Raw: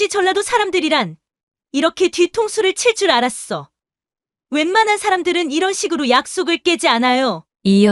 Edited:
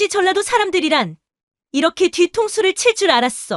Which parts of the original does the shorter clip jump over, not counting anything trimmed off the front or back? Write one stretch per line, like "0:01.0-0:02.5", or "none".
none